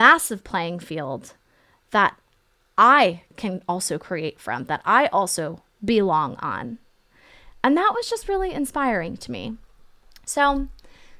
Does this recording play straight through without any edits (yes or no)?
yes